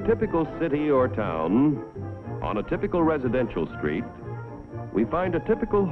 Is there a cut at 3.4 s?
yes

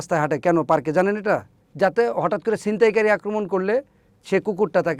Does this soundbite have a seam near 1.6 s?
yes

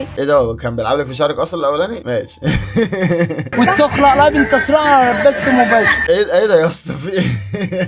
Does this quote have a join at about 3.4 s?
yes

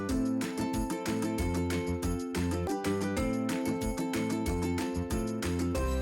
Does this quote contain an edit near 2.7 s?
yes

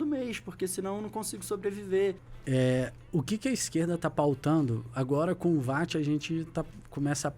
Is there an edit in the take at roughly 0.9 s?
no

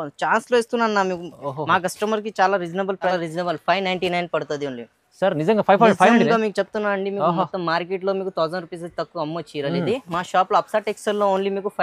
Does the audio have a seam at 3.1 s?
yes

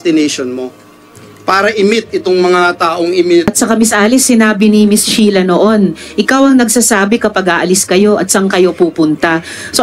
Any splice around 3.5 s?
yes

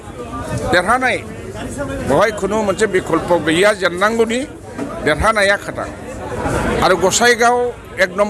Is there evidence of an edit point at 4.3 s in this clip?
no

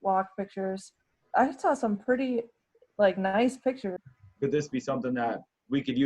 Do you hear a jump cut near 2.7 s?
no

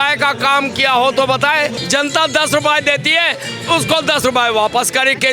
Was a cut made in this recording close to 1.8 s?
yes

